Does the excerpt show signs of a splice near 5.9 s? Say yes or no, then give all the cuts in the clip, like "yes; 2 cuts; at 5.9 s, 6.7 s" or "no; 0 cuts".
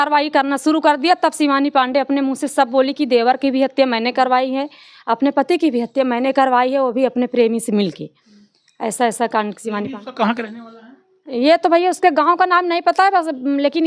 no; 0 cuts